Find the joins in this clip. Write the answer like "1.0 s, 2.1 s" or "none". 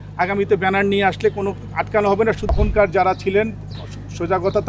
2.5 s